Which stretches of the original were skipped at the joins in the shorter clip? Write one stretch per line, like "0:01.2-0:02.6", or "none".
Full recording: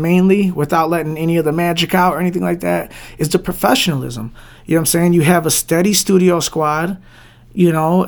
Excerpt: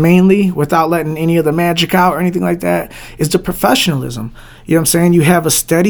none